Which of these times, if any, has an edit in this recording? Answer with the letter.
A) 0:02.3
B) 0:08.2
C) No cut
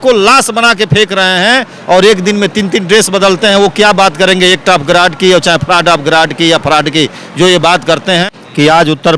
B